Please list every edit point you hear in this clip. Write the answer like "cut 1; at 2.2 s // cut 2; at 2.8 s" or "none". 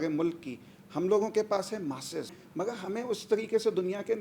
cut 1; at 2.4 s

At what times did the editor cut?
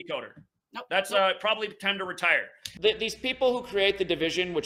none

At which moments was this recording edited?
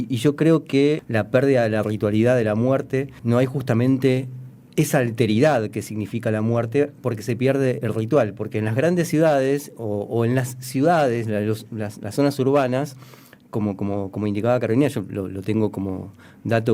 cut 1; at 1.0 s // cut 2; at 3.2 s

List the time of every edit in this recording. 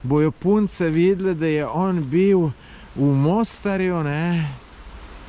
none

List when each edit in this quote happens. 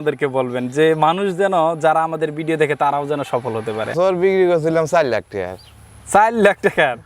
cut 1; at 3.9 s

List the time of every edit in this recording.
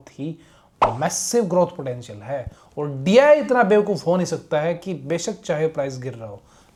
none

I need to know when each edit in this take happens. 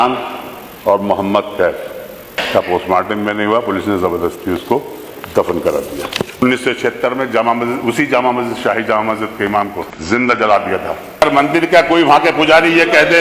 cut 1; at 2.4 s // cut 2; at 6.4 s // cut 3; at 9.9 s // cut 4; at 11.2 s

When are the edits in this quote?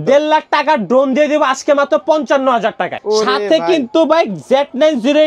cut 1; at 3.0 s

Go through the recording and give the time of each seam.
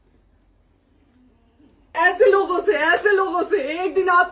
cut 1; at 1.9 s

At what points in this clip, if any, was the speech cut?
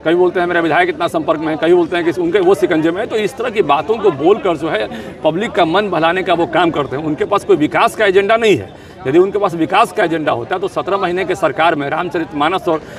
none

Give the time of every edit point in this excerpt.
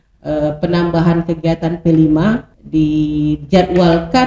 cut 1; at 2.5 s

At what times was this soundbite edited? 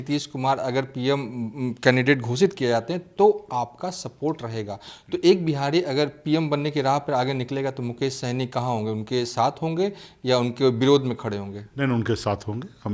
none

